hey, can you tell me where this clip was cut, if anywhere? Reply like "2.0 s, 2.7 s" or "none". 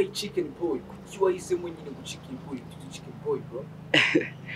none